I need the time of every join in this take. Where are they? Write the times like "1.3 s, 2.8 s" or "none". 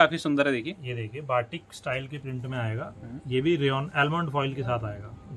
none